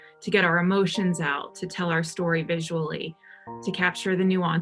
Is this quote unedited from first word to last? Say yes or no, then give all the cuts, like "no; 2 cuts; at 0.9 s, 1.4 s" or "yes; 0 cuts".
yes; 0 cuts